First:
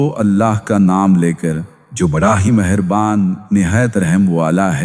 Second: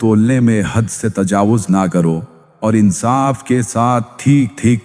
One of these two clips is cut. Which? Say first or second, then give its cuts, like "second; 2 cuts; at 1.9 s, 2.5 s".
second; 1 cut; at 2.4 s